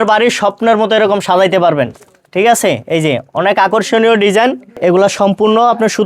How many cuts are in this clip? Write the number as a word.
one